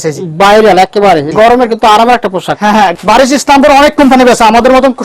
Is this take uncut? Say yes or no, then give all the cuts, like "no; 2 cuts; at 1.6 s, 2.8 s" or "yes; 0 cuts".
no; 2 cuts; at 1.3 s, 2.9 s